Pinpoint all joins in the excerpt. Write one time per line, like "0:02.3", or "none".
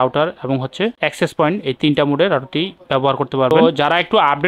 0:03.5

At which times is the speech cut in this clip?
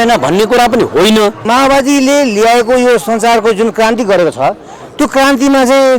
0:01.4

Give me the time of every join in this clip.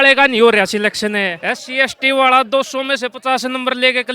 0:01.3

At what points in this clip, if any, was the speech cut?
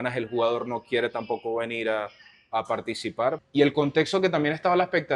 0:03.4

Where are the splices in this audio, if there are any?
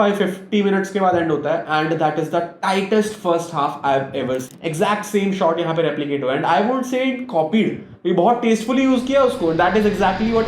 0:04.5

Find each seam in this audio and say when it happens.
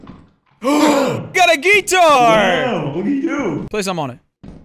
0:02.6
0:03.7

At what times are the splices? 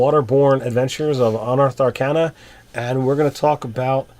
0:01.7

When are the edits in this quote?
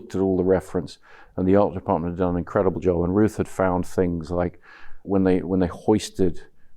0:05.0

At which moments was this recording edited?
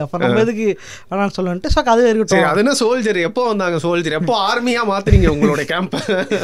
none

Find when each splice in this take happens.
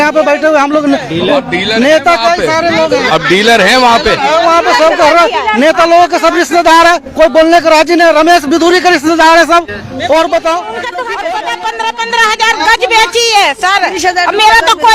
0:11.2

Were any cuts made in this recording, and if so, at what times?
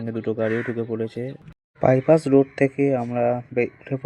0:01.4

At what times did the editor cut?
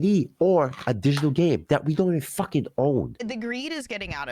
0:03.1

